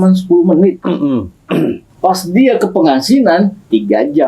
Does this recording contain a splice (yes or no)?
yes